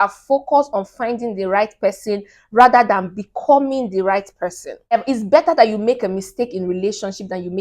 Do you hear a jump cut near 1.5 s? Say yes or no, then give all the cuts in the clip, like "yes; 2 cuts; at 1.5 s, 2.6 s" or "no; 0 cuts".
no; 1 cut; at 5.0 s